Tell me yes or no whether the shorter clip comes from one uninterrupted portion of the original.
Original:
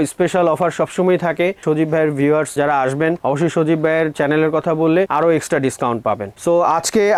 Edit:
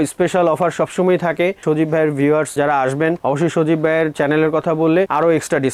yes